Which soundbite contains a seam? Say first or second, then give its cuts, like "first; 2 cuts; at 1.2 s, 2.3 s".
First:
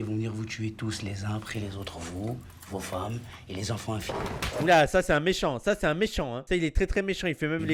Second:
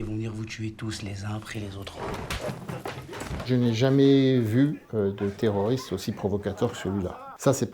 second; 2 cuts; at 1.9 s, 3.4 s